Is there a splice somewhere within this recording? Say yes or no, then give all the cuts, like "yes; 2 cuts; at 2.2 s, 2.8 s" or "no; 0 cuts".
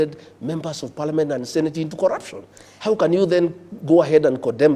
no; 0 cuts